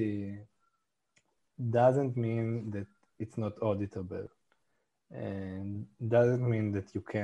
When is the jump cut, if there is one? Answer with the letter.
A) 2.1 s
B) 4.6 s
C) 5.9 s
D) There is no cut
D